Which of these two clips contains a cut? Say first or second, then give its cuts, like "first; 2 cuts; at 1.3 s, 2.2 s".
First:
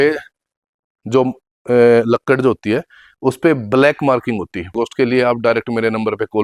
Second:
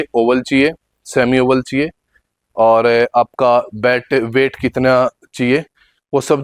first; 1 cut; at 4.7 s